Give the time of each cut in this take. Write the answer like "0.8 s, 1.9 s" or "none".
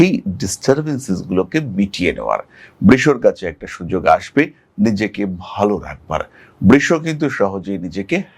none